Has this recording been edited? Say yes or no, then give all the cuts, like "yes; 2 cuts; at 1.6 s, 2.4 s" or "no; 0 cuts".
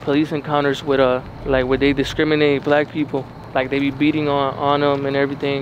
no; 0 cuts